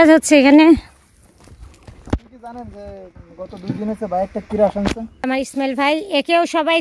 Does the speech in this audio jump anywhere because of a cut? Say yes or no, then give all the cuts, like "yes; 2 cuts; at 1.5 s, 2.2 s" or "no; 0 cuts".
yes; 1 cut; at 5.3 s